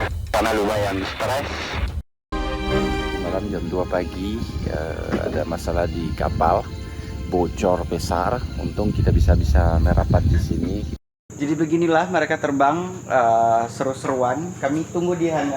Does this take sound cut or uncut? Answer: cut